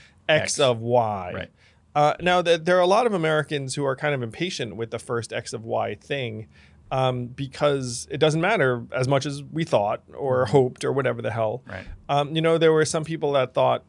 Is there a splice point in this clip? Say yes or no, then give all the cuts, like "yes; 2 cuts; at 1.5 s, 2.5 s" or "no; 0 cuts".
no; 0 cuts